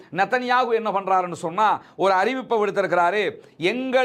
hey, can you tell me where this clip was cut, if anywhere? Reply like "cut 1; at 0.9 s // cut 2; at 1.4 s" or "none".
none